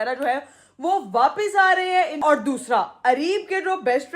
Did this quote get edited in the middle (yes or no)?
yes